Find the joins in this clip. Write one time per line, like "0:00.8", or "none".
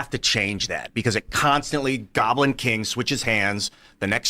0:01.3